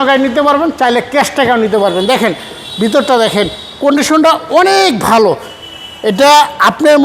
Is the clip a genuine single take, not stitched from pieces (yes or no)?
yes